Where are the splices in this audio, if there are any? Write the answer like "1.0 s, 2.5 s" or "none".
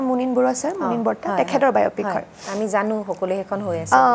none